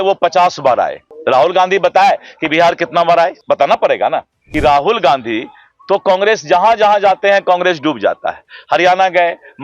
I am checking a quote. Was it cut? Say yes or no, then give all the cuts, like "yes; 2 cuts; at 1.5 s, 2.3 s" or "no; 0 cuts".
yes; 3 cuts; at 1.1 s, 3.4 s, 4.4 s